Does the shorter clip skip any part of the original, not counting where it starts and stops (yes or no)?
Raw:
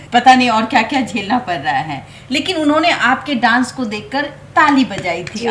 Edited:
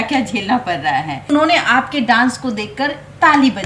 yes